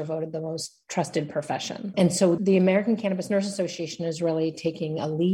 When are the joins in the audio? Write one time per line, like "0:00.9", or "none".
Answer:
0:02.3